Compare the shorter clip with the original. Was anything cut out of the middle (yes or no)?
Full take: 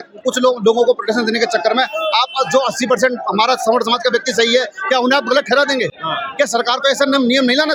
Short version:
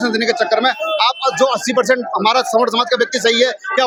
no